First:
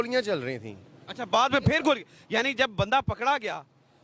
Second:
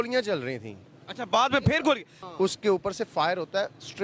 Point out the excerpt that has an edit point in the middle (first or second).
second